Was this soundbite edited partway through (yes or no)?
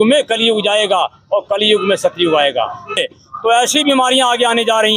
yes